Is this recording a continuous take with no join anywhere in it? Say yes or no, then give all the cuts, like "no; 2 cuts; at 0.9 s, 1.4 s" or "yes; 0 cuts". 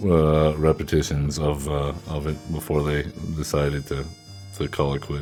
yes; 0 cuts